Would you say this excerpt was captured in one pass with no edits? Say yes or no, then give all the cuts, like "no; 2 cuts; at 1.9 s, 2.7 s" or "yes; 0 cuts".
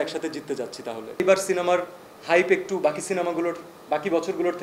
no; 1 cut; at 1.2 s